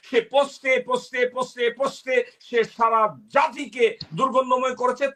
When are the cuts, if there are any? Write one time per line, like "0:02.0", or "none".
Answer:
none

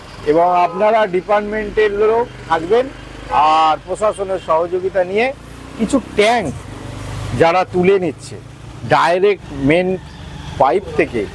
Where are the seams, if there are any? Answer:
none

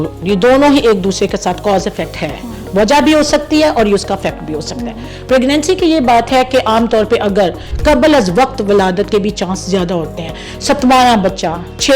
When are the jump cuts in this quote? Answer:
0:07.7

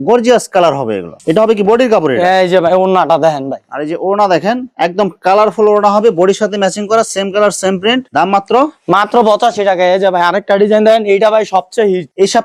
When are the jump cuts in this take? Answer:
none

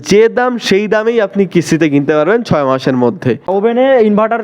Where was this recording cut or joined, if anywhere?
0:03.5

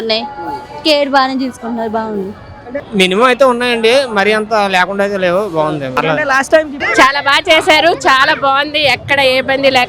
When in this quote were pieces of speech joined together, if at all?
0:02.8
0:06.8

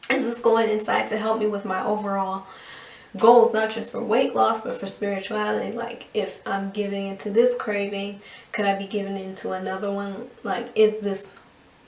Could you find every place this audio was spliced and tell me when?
none

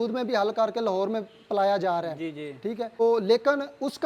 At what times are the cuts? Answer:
0:03.0

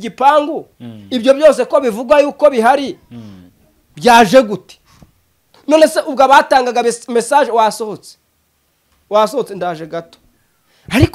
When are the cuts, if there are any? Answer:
0:10.2

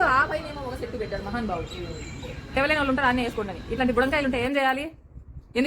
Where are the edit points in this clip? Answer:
none

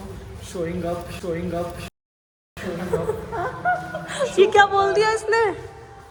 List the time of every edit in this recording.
none

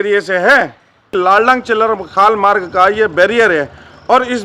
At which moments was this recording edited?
0:01.1

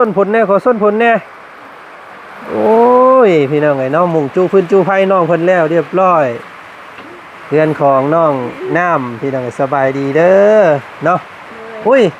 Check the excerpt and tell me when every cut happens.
none

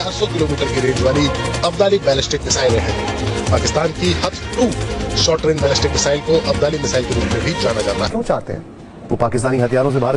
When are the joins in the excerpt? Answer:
0:08.1

